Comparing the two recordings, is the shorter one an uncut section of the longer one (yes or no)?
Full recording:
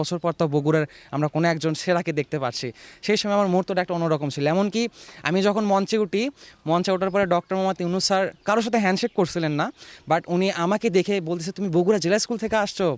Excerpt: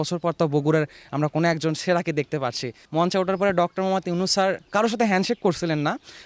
no